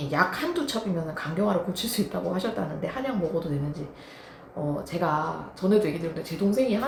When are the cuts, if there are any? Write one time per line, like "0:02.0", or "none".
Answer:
none